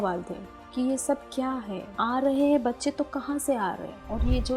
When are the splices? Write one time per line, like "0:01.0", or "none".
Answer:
0:01.8